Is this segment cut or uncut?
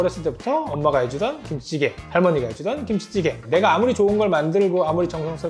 cut